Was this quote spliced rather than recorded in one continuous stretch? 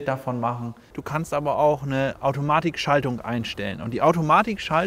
yes; 1 cut; at 0.9 s

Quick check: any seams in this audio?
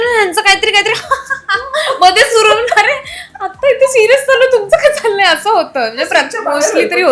no; 0 cuts

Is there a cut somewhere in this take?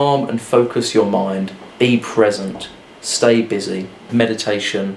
yes; 2 cuts; at 1.6 s, 4.1 s

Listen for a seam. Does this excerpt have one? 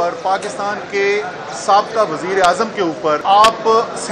yes; 1 cut; at 3.2 s

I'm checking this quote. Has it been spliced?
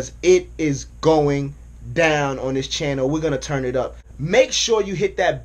yes; 1 cut; at 4.1 s

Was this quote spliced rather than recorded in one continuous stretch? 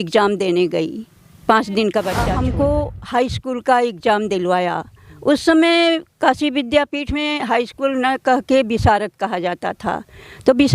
yes; 1 cut; at 2.2 s

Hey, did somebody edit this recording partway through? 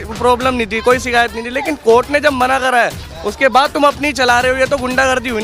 no; 0 cuts

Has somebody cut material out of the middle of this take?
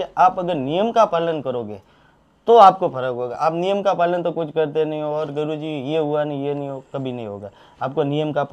no; 0 cuts

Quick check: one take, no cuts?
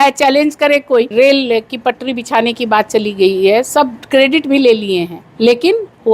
no; 2 cuts; at 1.1 s, 5.2 s

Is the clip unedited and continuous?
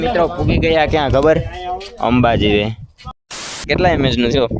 no; 1 cut; at 3.4 s

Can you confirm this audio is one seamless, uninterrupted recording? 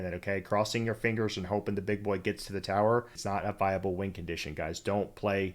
no; 1 cut; at 3.2 s

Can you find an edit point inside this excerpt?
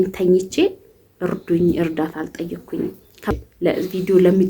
yes; 1 cut; at 3.3 s

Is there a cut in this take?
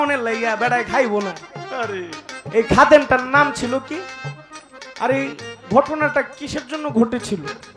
no; 0 cuts

